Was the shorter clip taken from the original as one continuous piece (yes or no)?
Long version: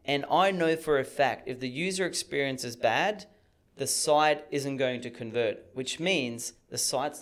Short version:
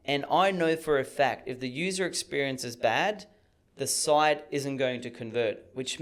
yes